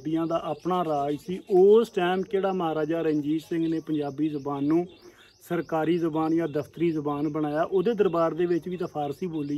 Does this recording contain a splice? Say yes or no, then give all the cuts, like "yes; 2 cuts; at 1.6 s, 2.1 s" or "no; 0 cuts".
no; 0 cuts